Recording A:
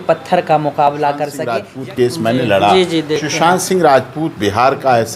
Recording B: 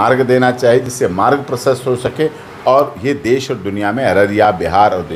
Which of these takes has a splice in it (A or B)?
A